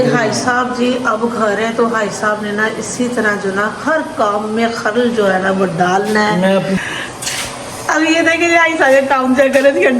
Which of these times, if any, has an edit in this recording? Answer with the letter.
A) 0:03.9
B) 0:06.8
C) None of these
B